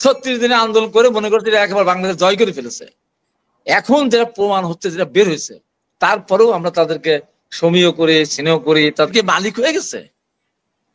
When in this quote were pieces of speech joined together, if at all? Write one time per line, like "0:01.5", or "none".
0:09.1